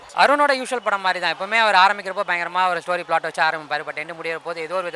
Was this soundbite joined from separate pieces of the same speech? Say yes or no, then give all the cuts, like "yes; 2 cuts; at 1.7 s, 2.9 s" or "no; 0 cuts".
no; 0 cuts